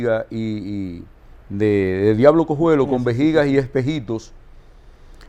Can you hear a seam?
no; 0 cuts

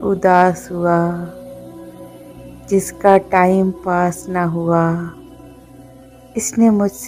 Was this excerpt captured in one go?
yes; 0 cuts

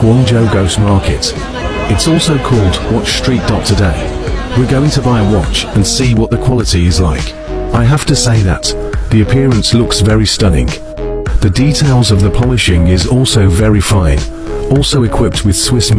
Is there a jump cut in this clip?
no; 0 cuts

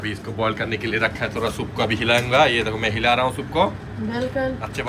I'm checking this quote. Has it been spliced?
no; 0 cuts

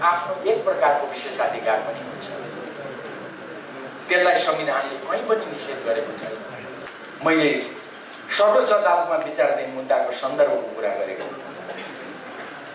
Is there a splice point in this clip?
yes; 1 cut; at 6.8 s

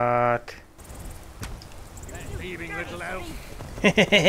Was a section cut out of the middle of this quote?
no; 0 cuts

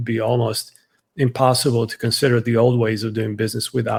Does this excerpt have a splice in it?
no; 0 cuts

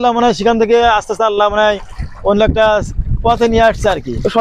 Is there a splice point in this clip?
no; 0 cuts

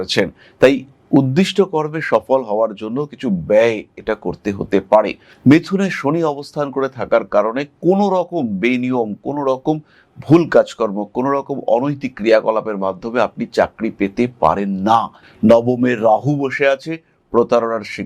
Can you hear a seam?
yes; 1 cut; at 5.2 s

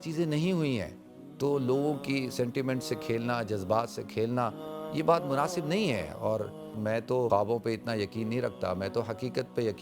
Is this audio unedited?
no; 1 cut; at 6.8 s

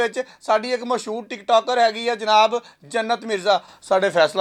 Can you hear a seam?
no; 0 cuts

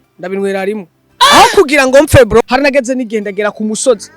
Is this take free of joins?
no; 1 cut; at 2.4 s

